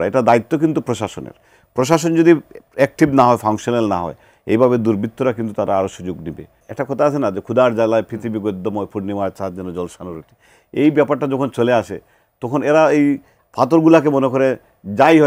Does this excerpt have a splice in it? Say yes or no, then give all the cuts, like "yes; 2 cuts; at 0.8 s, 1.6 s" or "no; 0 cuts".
yes; 1 cut; at 6.6 s